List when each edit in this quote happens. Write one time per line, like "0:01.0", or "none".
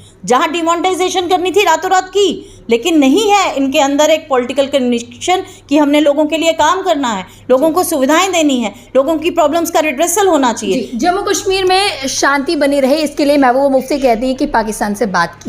none